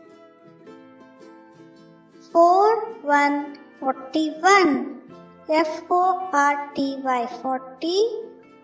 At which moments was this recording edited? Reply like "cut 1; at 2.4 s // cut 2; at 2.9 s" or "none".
none